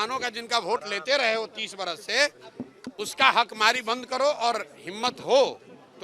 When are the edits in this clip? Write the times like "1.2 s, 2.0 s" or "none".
none